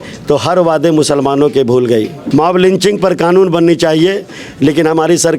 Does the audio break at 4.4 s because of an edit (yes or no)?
no